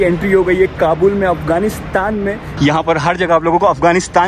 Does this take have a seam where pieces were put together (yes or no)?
yes